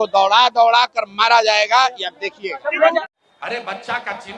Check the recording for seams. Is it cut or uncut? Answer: cut